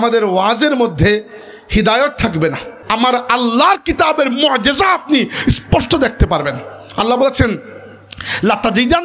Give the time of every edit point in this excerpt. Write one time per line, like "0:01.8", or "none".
0:02.7